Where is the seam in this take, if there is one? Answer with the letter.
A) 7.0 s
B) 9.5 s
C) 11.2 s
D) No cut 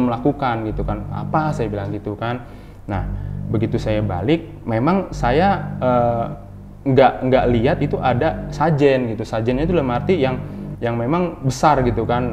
D